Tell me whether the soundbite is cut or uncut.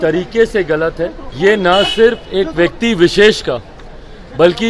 cut